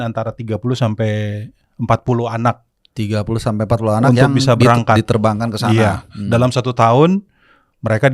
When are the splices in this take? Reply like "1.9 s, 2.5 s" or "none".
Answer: none

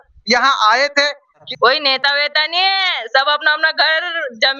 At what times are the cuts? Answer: 1.5 s

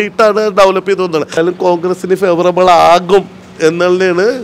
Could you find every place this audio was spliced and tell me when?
1.3 s

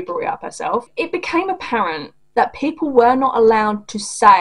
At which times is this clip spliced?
0.9 s, 2.1 s

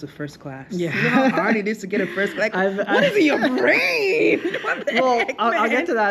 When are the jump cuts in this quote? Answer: none

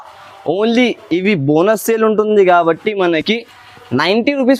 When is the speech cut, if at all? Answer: none

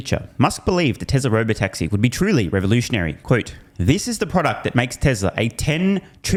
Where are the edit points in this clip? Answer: none

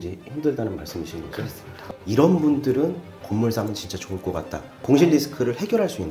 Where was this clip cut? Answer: 1.9 s, 4.7 s

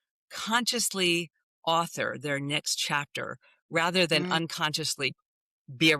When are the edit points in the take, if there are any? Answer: none

